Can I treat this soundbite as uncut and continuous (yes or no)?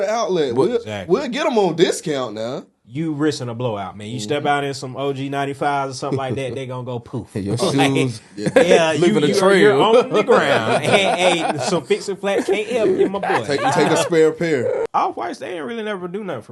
no